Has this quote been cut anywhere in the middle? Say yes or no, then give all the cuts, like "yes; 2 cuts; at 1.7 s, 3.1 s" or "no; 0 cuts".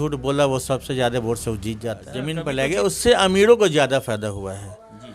yes; 1 cut; at 2.3 s